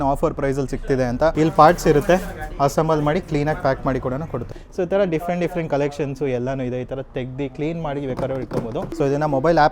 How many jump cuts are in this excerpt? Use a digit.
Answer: 3